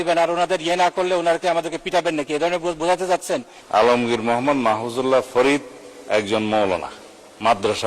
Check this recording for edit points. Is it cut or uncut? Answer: cut